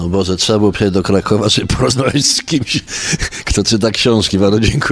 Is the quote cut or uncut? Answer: uncut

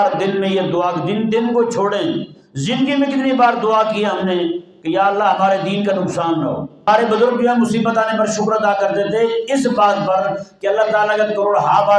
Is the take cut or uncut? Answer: cut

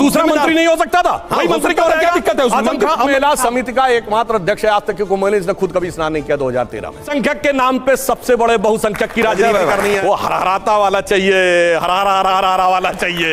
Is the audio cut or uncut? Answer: cut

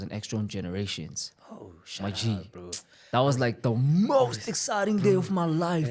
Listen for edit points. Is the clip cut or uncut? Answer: uncut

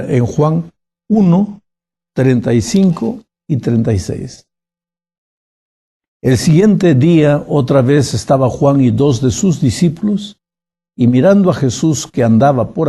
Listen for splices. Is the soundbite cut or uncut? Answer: cut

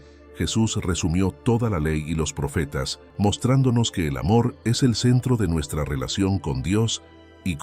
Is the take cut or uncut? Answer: cut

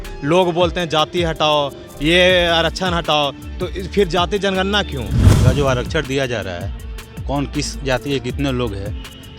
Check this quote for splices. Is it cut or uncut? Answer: cut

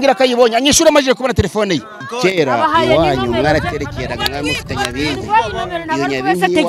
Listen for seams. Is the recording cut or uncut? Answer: cut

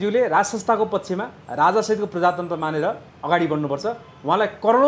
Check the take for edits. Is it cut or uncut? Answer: cut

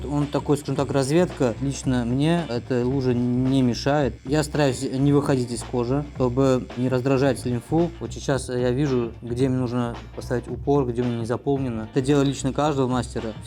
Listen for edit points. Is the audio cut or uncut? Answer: cut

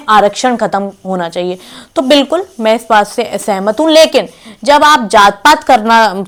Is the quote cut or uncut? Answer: uncut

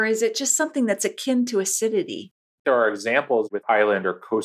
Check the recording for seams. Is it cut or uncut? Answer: cut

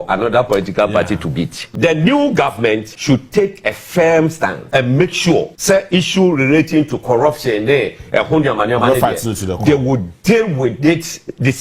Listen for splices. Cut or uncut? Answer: cut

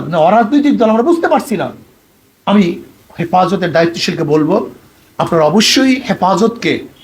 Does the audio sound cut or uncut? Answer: uncut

